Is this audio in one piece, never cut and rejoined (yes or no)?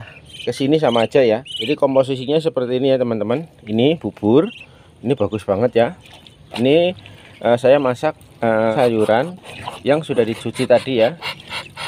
no